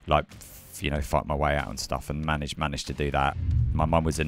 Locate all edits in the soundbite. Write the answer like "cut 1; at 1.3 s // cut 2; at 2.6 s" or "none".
cut 1; at 3.3 s